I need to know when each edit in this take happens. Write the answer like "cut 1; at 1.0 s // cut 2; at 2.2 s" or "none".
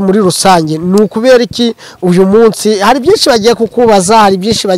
none